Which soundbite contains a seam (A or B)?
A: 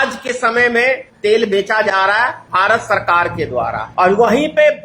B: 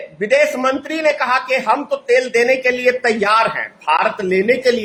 A